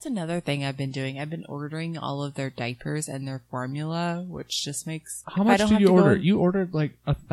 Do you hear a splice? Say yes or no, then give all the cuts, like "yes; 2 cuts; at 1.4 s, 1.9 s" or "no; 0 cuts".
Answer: yes; 1 cut; at 5.2 s